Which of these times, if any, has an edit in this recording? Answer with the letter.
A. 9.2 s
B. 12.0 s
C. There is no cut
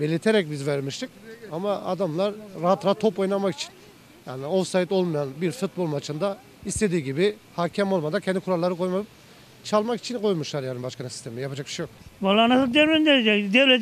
B